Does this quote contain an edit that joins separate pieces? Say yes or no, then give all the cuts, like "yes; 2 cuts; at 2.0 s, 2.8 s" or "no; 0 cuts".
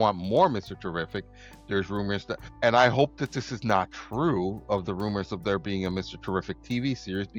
no; 0 cuts